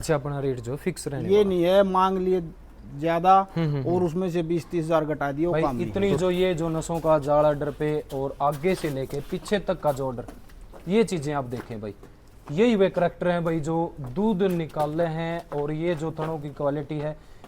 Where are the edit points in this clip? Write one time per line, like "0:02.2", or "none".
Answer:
0:05.5